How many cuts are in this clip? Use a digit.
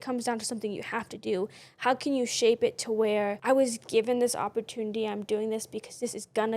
1